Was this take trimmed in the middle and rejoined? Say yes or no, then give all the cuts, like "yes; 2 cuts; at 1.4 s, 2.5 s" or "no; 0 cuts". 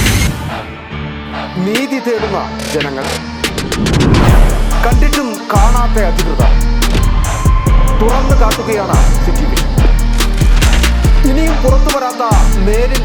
no; 0 cuts